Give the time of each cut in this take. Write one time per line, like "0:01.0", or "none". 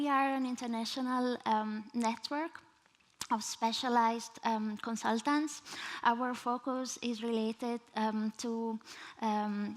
0:04.4